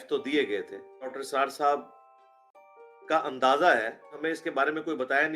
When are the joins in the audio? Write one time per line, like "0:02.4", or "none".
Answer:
0:01.2
0:04.2